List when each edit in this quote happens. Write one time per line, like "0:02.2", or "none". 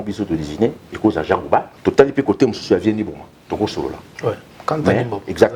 0:01.7